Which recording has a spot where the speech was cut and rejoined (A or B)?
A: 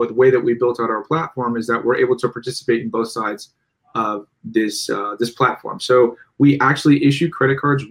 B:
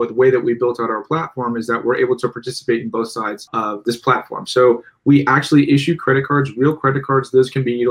B